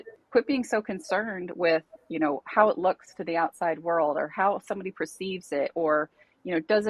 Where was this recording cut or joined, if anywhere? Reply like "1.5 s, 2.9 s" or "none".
none